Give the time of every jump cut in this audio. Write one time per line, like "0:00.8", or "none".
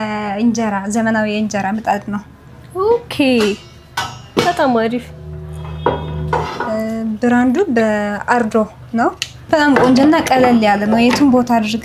none